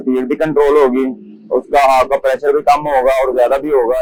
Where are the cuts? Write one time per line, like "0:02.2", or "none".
none

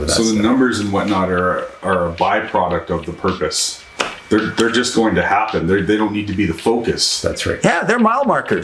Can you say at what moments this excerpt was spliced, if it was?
none

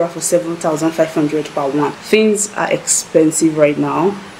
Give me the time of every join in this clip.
0:01.9

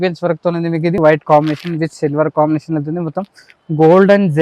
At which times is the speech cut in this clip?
0:01.0

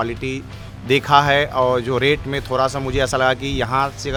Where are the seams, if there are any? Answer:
none

